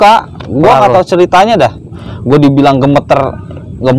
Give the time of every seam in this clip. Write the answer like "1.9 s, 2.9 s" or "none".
1.9 s